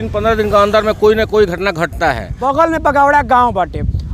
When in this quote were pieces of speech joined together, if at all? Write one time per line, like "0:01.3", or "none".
0:02.3